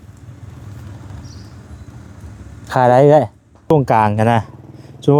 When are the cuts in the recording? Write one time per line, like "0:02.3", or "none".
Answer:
0:03.7